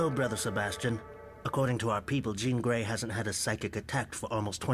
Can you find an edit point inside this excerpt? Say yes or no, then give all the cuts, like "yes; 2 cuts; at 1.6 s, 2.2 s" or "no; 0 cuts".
no; 0 cuts